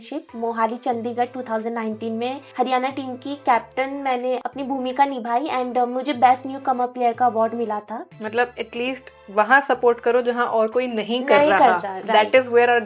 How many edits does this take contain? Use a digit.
3